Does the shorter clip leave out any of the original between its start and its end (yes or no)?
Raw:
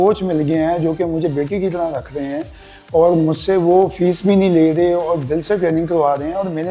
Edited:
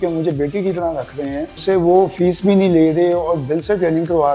yes